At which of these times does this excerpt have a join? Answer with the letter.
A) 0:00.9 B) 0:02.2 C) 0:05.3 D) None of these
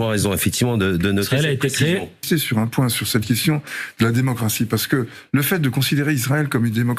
B